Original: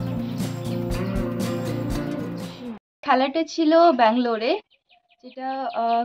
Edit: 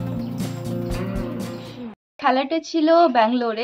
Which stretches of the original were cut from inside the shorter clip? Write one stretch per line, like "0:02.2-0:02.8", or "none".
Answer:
0:01.7-0:02.5